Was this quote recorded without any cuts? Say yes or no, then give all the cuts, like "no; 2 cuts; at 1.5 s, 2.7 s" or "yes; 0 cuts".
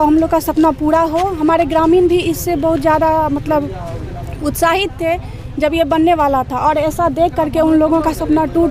yes; 0 cuts